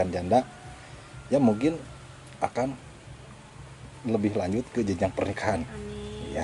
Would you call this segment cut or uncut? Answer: uncut